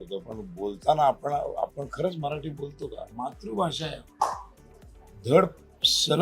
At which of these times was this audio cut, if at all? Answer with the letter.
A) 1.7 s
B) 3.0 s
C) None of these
B